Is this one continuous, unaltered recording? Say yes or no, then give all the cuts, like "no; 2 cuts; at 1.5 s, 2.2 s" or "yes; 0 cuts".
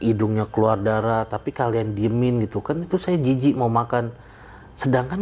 yes; 0 cuts